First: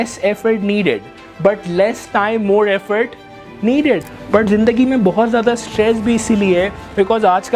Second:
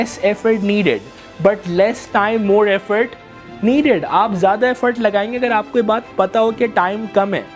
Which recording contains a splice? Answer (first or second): first